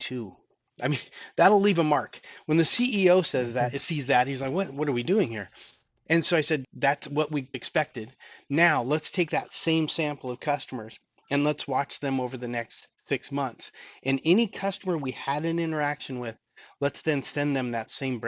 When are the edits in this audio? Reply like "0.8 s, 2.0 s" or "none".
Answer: 6.6 s, 7.6 s